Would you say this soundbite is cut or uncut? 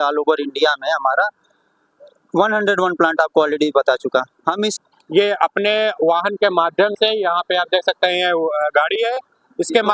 cut